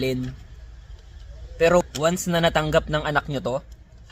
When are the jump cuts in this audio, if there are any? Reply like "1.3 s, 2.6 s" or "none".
1.8 s